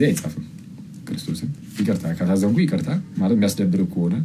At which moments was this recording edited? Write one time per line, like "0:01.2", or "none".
none